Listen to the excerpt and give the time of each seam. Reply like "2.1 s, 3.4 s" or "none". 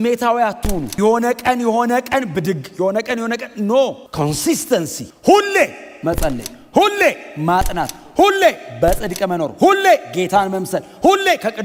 none